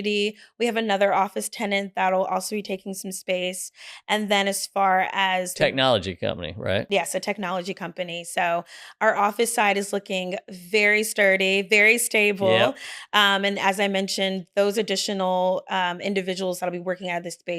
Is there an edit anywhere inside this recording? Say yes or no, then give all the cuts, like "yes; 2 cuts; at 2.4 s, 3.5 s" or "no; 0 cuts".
yes; 1 cut; at 6.9 s